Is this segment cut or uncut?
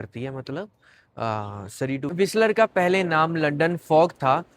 cut